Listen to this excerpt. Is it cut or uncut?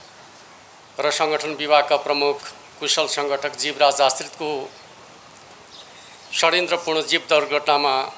uncut